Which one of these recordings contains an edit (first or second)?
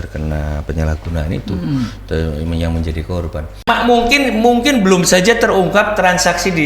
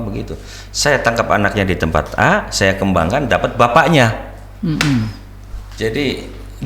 first